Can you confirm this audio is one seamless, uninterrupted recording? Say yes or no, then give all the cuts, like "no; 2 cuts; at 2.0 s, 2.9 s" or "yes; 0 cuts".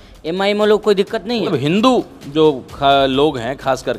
no; 1 cut; at 1.5 s